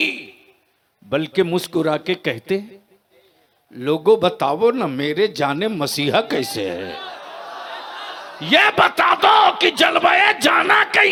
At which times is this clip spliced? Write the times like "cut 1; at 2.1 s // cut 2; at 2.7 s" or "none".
none